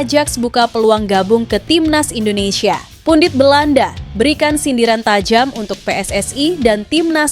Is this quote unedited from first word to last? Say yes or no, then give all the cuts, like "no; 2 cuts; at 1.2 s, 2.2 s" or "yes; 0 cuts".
no; 1 cut; at 2.9 s